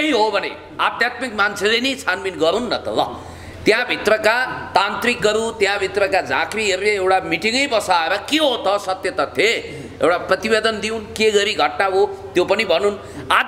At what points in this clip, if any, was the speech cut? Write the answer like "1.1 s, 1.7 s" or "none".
none